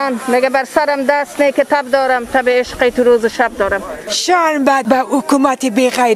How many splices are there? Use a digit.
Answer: 1